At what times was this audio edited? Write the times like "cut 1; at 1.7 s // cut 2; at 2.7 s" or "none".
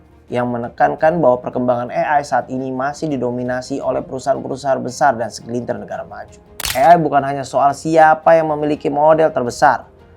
cut 1; at 6.7 s